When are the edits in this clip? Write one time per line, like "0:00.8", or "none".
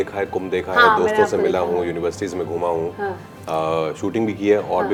none